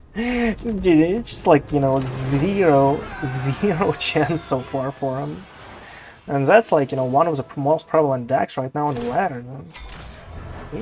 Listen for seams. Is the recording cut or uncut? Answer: uncut